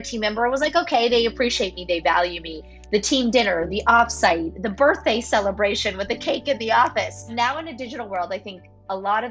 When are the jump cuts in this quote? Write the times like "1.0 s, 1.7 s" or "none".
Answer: 7.3 s